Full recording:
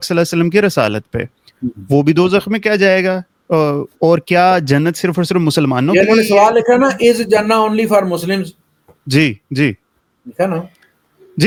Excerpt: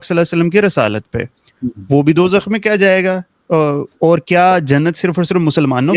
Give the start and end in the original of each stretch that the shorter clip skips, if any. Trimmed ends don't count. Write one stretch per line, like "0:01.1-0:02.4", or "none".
none